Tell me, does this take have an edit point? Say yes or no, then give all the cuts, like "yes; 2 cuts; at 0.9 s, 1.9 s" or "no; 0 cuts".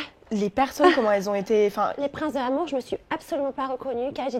yes; 1 cut; at 2.0 s